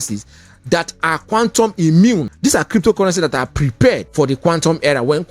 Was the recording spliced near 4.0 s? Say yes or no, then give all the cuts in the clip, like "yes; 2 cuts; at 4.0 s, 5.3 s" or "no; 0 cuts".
yes; 2 cuts; at 2.3 s, 4.0 s